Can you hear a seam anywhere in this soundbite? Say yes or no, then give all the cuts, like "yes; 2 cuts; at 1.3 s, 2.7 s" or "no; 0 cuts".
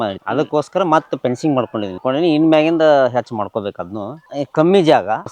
yes; 2 cuts; at 2.0 s, 4.2 s